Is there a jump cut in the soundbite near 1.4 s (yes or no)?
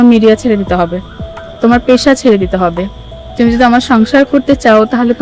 no